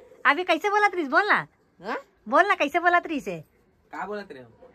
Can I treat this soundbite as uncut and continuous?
yes; 0 cuts

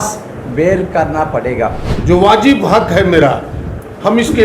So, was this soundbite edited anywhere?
yes; 1 cut; at 1.9 s

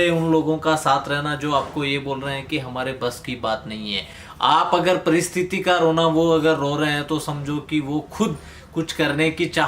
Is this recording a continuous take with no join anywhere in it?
yes; 0 cuts

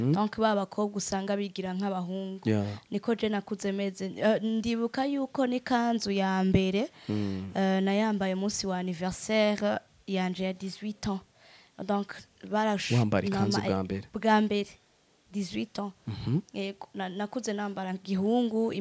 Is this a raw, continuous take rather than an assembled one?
yes; 0 cuts

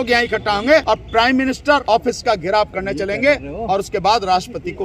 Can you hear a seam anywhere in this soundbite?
yes; 2 cuts; at 0.8 s, 1.8 s

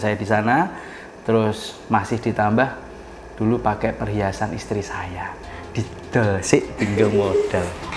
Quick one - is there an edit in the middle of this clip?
no; 0 cuts

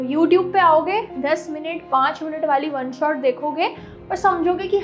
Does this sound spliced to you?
no; 0 cuts

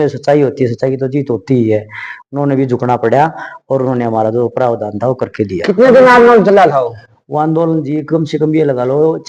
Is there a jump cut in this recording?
no; 0 cuts

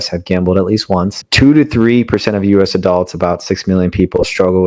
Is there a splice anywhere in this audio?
yes; 1 cut; at 1.2 s

